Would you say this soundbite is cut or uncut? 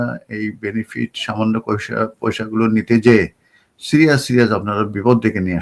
uncut